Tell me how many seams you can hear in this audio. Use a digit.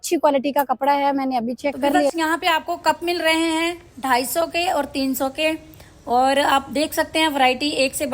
1